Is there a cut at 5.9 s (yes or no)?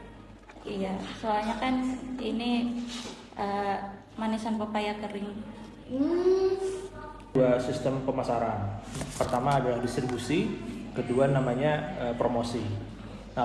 no